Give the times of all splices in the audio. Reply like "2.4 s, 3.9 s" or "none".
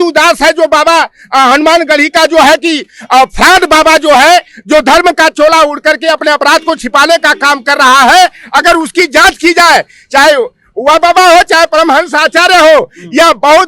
none